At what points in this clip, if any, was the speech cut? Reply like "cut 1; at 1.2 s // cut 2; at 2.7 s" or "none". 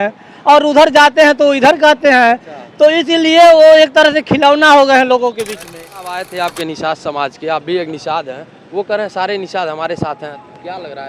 cut 1; at 6.2 s